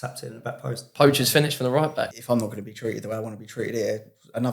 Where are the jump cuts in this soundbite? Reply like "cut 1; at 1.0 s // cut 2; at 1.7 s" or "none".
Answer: cut 1; at 0.9 s // cut 2; at 2.2 s